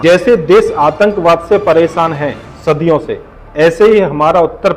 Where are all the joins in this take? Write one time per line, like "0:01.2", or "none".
none